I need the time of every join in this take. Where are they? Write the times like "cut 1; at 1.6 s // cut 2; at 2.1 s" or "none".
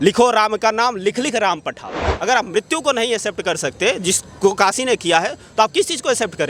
cut 1; at 2.1 s